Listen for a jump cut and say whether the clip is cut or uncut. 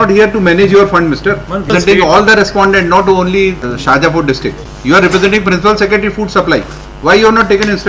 cut